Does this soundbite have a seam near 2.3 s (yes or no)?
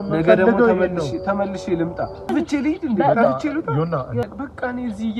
yes